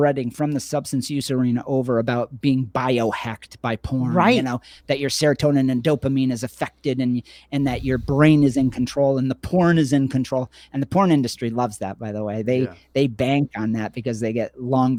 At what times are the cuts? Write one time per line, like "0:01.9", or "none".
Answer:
none